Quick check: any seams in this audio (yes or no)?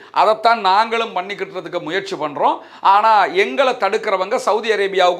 no